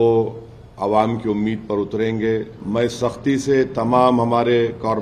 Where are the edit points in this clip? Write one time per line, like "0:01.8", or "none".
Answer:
0:02.6